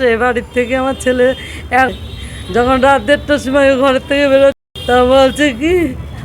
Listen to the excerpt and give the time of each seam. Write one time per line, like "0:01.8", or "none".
0:01.9
0:04.6